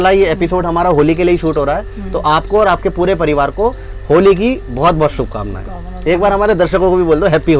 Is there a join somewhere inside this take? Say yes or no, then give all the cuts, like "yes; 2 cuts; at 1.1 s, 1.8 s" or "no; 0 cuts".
no; 0 cuts